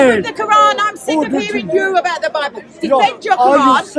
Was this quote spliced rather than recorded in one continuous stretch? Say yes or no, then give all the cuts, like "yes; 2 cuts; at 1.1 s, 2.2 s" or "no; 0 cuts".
no; 0 cuts